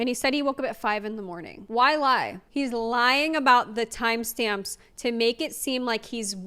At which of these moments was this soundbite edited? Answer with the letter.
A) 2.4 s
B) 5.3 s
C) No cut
A